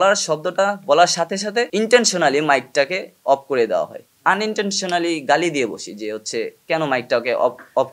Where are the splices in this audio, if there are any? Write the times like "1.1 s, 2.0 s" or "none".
1.7 s, 4.0 s